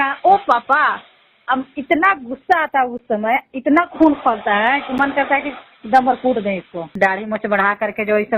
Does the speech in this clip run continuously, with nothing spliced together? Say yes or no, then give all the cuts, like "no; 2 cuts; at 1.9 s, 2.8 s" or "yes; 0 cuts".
yes; 0 cuts